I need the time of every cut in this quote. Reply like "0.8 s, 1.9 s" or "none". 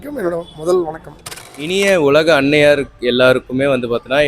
1.7 s